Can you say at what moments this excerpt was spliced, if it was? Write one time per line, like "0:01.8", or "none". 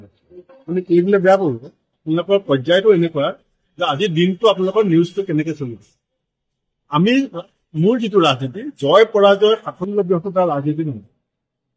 none